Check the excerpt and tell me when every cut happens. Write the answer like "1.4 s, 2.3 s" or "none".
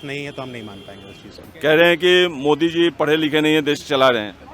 1.5 s

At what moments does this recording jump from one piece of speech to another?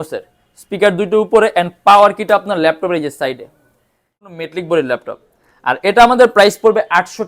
4.2 s

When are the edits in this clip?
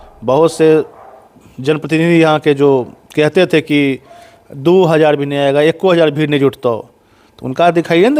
none

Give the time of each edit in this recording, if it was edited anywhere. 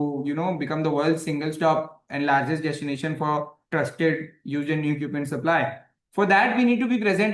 none

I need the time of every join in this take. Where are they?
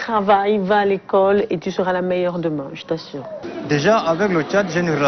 3.4 s

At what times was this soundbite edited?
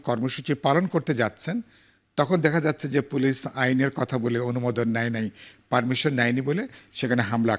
none

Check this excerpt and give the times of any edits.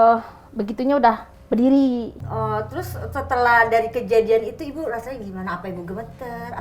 2.2 s

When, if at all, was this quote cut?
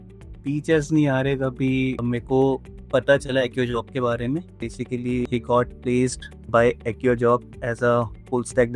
2.0 s, 2.7 s, 4.9 s, 6.3 s

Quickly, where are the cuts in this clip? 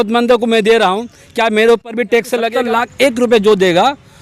2.5 s

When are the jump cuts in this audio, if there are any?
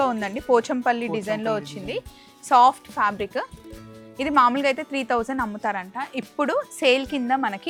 none

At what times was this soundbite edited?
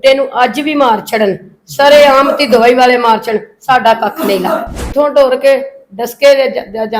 4.9 s

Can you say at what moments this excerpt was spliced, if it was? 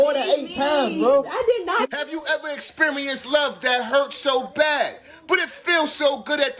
3.7 s

